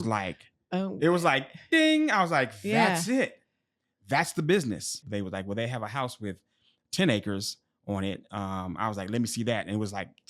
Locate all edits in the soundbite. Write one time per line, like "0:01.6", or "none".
0:05.0